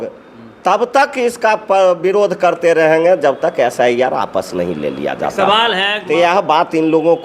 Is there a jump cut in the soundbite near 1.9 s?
no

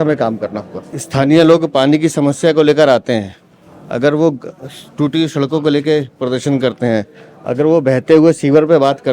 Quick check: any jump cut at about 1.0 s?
yes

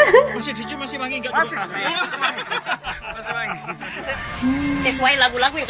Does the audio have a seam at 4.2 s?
yes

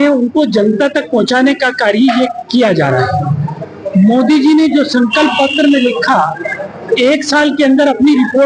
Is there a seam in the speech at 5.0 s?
no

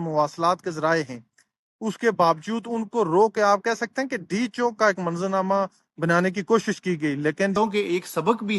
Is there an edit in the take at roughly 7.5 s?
yes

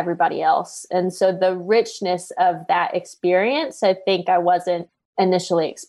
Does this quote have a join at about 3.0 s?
no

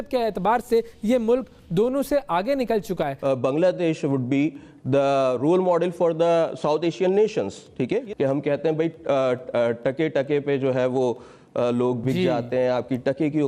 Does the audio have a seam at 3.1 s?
yes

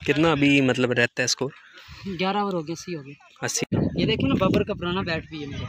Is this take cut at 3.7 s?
yes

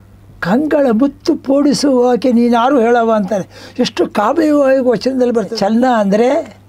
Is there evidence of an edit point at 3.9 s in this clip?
no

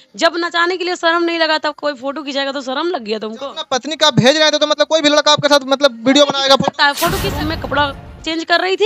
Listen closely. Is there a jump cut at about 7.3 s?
yes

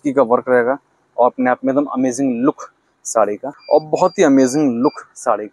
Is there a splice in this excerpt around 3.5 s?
yes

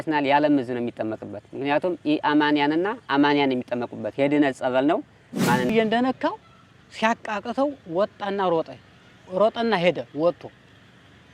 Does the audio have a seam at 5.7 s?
yes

